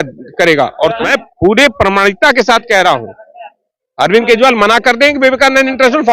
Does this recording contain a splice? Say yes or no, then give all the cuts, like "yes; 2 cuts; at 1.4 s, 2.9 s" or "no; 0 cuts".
yes; 1 cut; at 1.0 s